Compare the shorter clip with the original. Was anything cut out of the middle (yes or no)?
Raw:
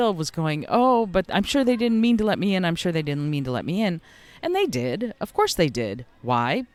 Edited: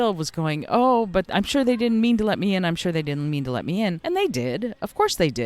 yes